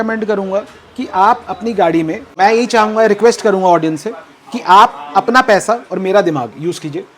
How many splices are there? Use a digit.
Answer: 1